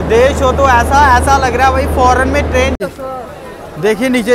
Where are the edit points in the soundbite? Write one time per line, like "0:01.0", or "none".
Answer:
0:02.8